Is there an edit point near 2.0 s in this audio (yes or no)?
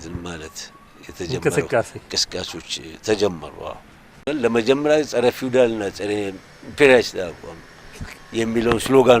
no